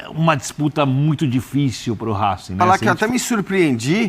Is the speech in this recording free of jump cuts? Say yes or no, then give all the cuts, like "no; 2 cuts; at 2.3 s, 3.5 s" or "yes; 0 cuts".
no; 1 cut; at 2.6 s